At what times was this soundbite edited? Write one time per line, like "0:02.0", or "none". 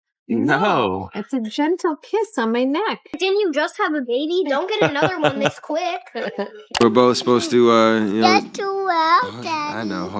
0:03.2
0:06.8